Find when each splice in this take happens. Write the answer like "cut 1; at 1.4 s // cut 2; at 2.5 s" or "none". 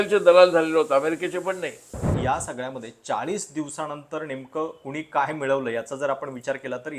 cut 1; at 2.0 s